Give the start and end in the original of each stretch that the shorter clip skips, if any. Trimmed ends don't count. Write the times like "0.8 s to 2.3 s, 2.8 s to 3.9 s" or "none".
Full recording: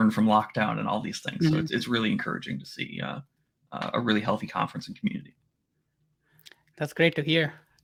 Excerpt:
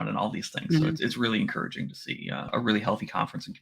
3.2 s to 3.9 s